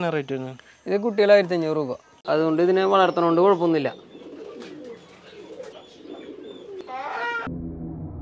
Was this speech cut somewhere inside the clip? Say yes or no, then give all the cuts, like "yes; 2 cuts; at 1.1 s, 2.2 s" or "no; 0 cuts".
yes; 3 cuts; at 2.2 s, 5.7 s, 6.8 s